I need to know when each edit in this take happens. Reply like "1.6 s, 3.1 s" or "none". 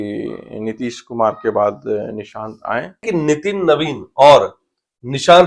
3.0 s

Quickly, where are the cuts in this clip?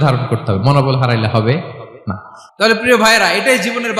1.9 s

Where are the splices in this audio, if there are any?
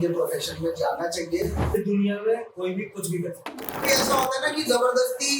1.6 s, 3.9 s

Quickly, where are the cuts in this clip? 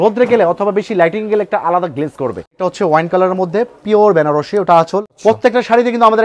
2.6 s, 5.1 s

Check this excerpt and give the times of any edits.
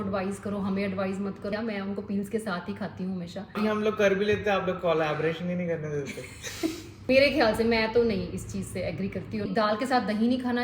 1.5 s, 3.6 s, 7.0 s, 9.5 s

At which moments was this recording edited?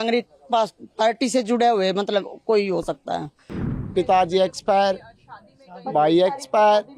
3.7 s

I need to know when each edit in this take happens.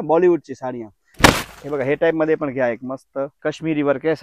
1.1 s, 3.3 s

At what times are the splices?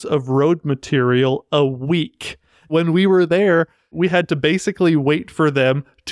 2.7 s, 3.9 s

